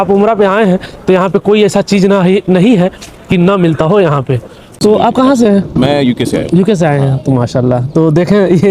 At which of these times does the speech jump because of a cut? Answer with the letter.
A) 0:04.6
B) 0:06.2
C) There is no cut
A